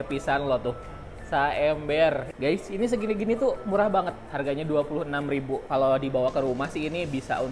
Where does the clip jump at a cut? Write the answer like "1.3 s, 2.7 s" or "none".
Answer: 2.3 s